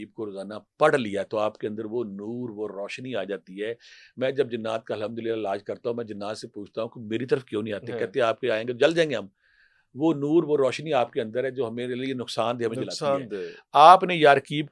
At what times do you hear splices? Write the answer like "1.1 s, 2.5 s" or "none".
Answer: none